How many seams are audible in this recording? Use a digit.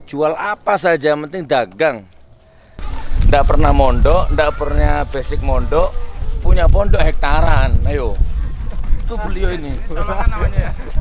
1